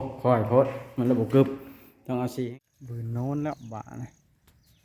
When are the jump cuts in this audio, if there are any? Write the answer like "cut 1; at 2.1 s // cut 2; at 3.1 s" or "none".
cut 1; at 2.3 s